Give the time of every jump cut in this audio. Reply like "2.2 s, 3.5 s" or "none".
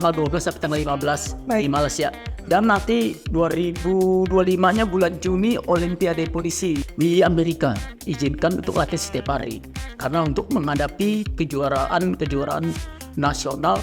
6.9 s, 7.9 s